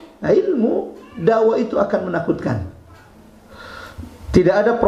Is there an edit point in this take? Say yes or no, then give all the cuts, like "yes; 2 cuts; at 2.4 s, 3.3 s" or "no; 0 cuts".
yes; 1 cut; at 3.2 s